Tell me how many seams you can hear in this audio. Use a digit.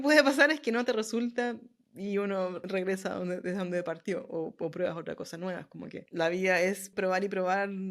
3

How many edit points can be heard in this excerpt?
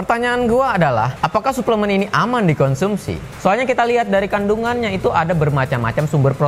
0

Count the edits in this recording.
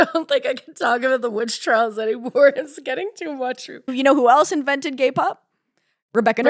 1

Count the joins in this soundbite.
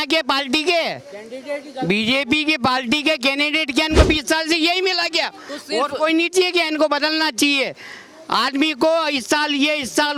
0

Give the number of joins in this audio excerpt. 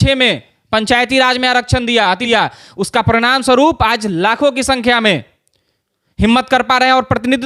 1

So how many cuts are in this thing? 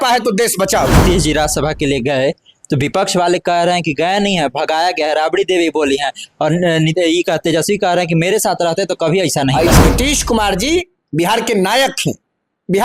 2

